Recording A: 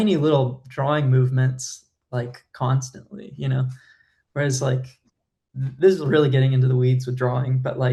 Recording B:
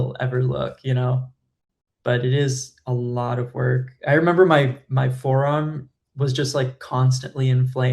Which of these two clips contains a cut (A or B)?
B